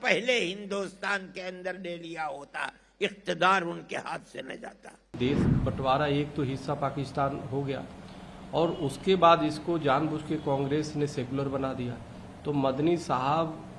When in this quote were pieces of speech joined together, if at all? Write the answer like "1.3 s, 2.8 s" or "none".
5.1 s